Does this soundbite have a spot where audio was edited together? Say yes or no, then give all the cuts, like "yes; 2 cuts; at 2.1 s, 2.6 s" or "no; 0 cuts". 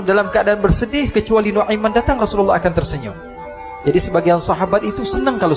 no; 0 cuts